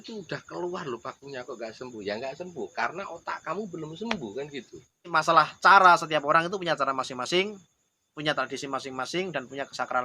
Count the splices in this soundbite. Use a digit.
1